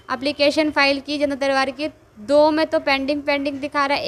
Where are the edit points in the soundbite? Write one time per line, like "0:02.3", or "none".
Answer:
none

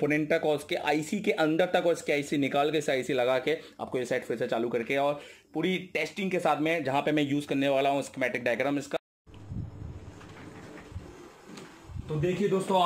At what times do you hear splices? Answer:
none

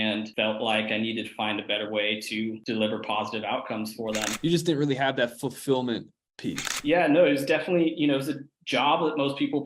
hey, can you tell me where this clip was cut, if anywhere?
0:04.3

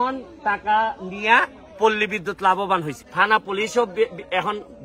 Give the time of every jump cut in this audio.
0:03.0

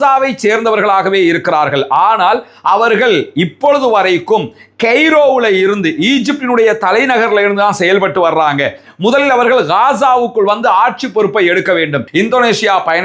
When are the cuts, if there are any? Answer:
0:12.0

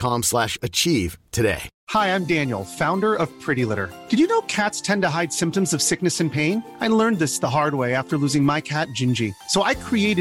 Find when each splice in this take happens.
none

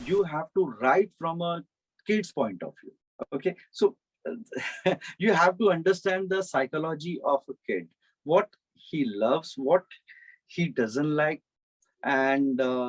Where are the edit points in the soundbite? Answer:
none

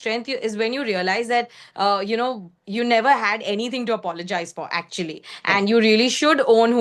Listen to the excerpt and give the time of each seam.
none

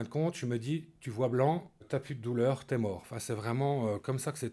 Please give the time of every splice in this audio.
0:01.8

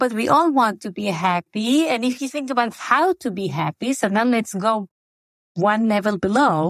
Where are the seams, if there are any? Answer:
none

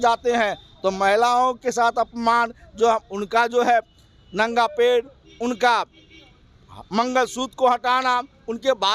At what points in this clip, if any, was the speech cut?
none

